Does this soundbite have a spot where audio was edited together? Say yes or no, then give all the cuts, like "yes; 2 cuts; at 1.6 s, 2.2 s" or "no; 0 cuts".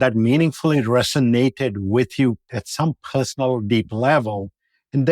yes; 1 cut; at 2.5 s